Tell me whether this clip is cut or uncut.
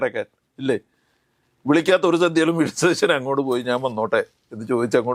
uncut